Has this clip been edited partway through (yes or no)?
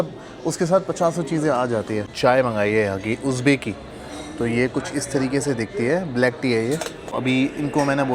yes